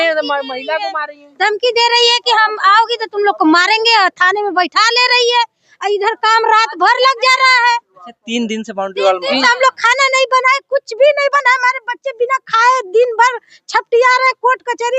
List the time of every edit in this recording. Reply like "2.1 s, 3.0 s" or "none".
none